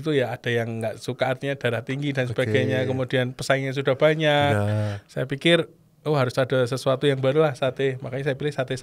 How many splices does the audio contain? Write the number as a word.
zero